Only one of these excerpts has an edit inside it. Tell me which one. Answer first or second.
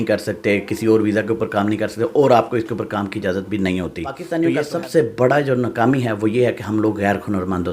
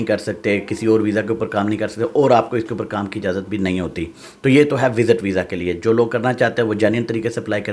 first